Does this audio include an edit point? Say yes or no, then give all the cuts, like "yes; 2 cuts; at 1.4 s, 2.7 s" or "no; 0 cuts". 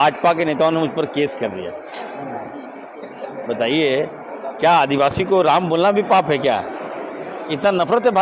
no; 0 cuts